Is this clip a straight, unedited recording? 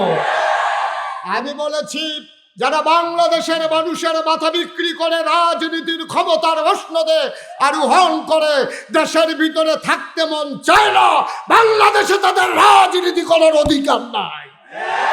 yes; 0 cuts

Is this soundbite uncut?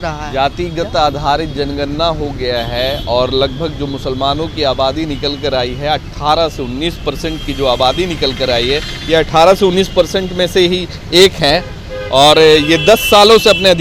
yes; 0 cuts

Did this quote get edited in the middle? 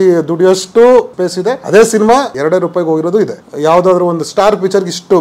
yes; 3 cuts; at 1.2 s, 2.3 s, 3.4 s

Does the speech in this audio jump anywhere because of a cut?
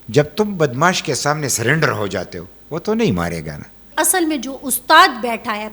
yes; 1 cut; at 3.9 s

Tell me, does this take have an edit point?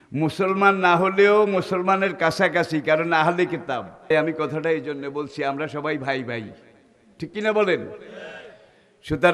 yes; 1 cut; at 4.1 s

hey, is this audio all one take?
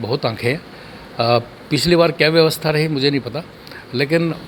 yes; 0 cuts

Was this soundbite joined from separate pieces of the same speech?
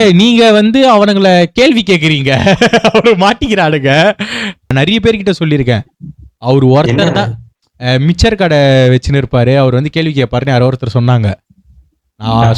yes; 1 cut; at 4.7 s

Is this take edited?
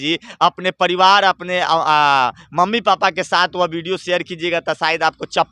no; 0 cuts

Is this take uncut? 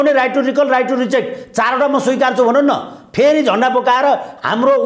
yes; 0 cuts

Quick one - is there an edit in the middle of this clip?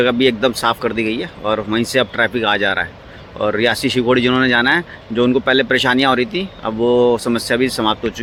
no; 0 cuts

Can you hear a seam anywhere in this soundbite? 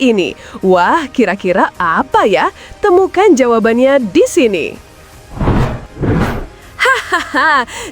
yes; 2 cuts; at 4.9 s, 6.5 s

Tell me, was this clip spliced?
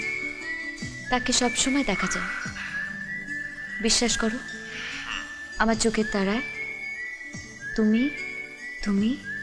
no; 0 cuts

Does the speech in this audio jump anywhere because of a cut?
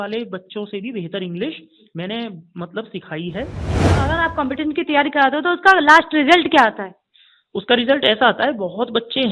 yes; 1 cut; at 3.7 s

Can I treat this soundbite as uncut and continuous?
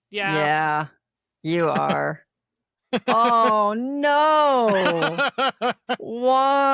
yes; 0 cuts

